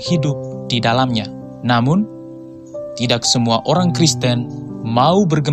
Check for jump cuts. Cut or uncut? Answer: cut